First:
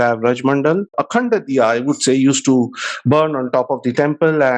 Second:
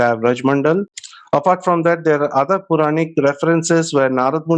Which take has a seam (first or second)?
first